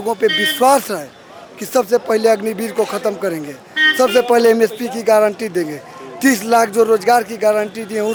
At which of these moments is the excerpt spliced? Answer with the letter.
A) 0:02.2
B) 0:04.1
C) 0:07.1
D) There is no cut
D